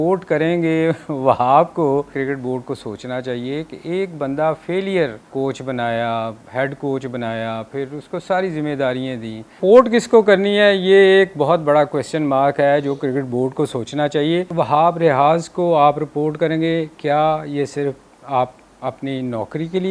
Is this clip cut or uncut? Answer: cut